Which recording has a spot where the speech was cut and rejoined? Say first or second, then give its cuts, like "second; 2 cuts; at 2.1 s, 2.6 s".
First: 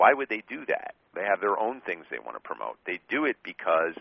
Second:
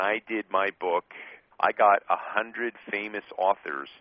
second; 1 cut; at 1.4 s